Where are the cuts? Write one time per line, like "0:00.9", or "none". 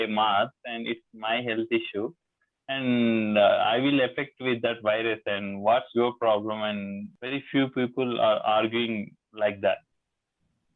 none